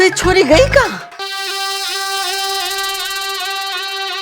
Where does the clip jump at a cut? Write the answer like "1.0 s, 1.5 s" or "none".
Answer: 1.1 s